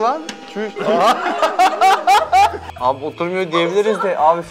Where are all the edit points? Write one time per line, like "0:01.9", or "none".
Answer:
0:02.7